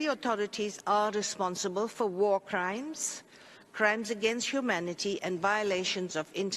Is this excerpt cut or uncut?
uncut